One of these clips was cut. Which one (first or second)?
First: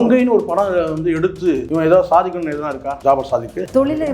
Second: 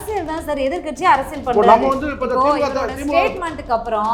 first